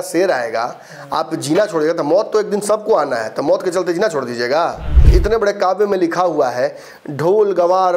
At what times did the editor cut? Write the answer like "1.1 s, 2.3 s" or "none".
5.0 s